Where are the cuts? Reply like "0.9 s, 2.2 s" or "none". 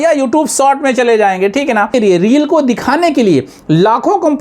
1.9 s